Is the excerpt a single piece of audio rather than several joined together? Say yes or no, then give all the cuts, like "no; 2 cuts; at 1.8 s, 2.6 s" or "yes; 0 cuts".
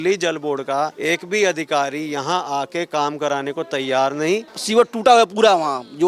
no; 2 cuts; at 1.0 s, 4.5 s